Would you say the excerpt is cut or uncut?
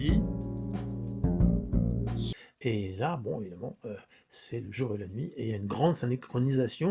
cut